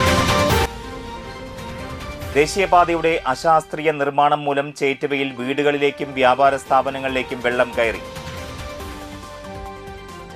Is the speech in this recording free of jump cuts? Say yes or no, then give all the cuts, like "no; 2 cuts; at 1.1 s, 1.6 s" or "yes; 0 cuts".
yes; 0 cuts